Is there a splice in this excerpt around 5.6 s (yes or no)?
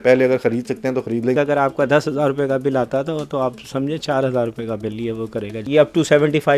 yes